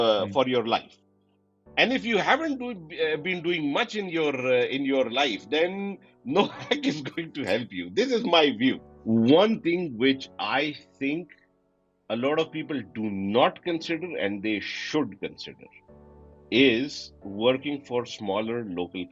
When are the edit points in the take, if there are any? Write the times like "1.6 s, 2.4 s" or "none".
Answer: 8.9 s